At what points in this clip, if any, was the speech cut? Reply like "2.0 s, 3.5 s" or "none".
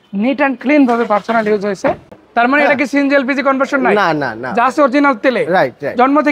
2.2 s